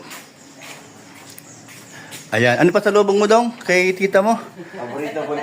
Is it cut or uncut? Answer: uncut